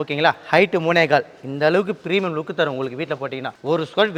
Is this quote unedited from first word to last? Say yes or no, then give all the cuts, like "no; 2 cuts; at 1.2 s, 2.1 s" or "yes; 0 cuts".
yes; 0 cuts